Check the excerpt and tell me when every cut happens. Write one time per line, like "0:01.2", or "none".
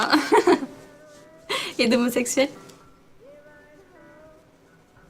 0:03.1